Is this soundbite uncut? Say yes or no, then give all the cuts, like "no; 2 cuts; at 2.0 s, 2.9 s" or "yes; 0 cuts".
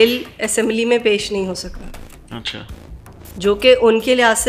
yes; 0 cuts